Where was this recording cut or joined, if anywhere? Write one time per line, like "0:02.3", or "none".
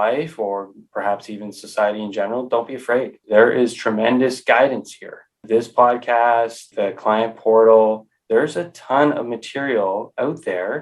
0:03.2
0:05.4
0:06.6

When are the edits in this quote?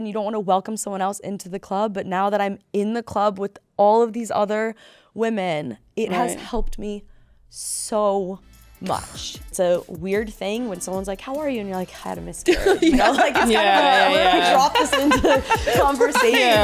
0:09.5

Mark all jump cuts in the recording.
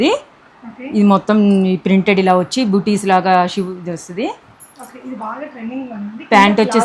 none

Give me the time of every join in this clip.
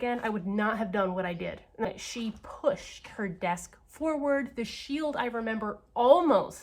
0:01.8

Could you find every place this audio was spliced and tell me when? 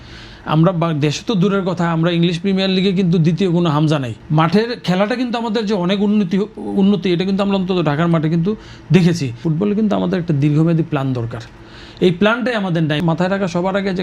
0:04.2
0:09.4
0:13.0

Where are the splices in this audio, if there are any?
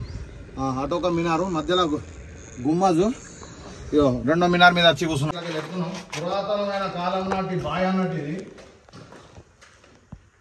0:05.3

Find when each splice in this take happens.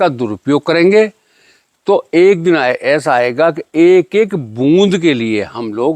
none

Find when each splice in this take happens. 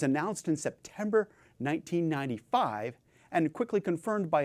none

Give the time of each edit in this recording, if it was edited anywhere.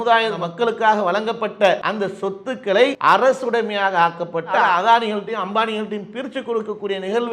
0:01.9
0:03.0

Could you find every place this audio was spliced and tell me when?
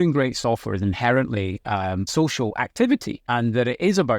0:02.0
0:03.2

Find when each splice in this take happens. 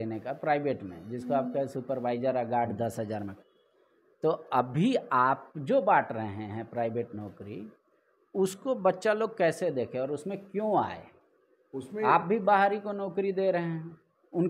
none

